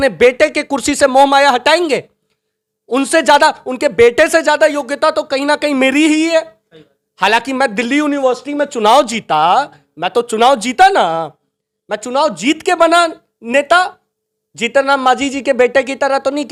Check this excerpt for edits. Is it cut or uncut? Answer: uncut